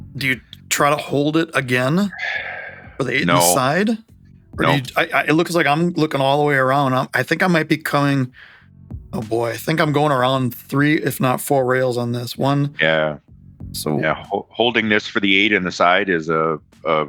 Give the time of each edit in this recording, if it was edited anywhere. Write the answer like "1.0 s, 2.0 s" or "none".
none